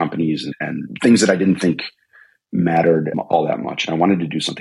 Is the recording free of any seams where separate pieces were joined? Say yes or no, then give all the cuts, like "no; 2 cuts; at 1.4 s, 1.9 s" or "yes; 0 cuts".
no; 1 cut; at 3.1 s